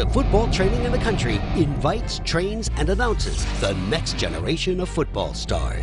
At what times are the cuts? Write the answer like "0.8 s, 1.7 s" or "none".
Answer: none